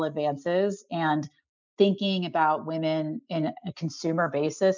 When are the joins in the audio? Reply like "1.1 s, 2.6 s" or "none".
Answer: none